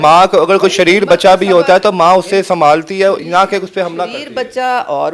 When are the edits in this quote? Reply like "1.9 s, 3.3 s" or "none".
none